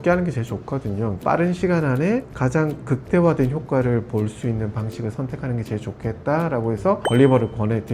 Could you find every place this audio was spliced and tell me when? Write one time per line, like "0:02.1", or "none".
0:01.2
0:02.3
0:07.0